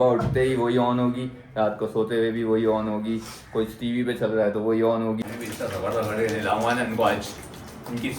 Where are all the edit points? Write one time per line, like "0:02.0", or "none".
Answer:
0:05.2